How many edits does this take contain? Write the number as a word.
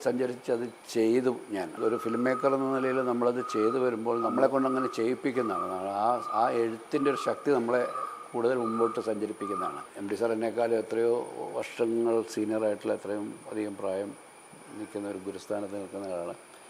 four